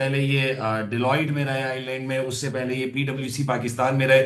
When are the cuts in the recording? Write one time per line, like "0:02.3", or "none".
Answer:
none